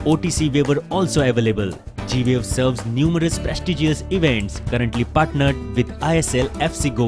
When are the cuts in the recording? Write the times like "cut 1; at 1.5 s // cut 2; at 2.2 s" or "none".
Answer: cut 1; at 6.2 s

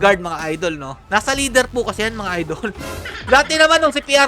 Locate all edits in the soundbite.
cut 1; at 1.0 s // cut 2; at 3.2 s

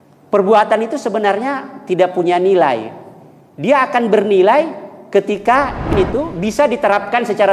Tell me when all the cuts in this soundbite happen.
cut 1; at 5.9 s

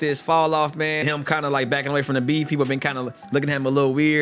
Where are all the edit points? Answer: cut 1; at 1.0 s

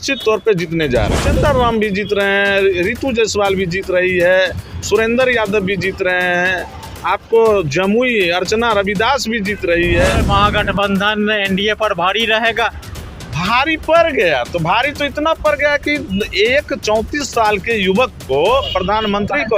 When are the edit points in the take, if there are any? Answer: cut 1; at 1.2 s // cut 2; at 10.2 s

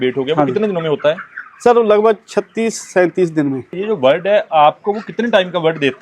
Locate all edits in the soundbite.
cut 1; at 3.7 s

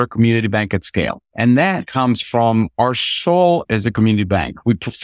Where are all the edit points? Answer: cut 1; at 1.2 s // cut 2; at 1.9 s

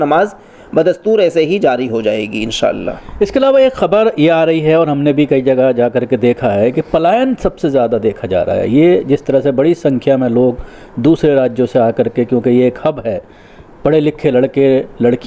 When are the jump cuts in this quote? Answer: none

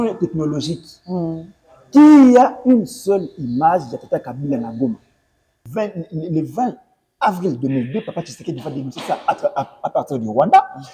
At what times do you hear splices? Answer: cut 1; at 5.6 s

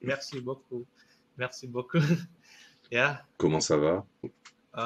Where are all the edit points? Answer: none

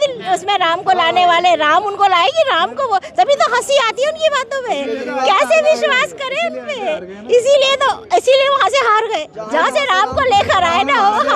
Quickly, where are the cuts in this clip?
none

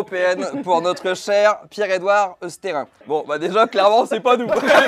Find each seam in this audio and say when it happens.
cut 1; at 2.9 s

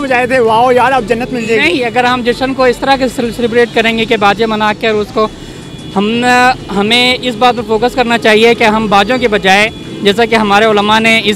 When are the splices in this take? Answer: none

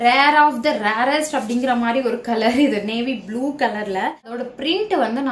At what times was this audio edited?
cut 1; at 4.4 s

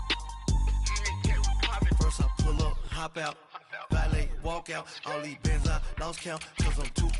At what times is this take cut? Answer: cut 1; at 1.0 s

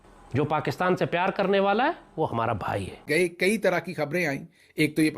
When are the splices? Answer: cut 1; at 3.1 s

